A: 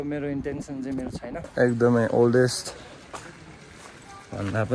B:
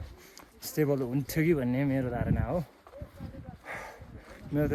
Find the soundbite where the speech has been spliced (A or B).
A